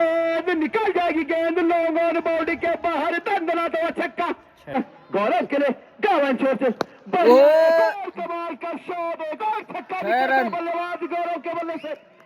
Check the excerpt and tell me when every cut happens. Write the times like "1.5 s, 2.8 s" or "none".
4.7 s